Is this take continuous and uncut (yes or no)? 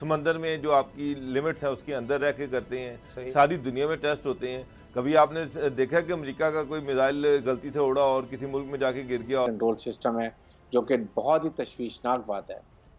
no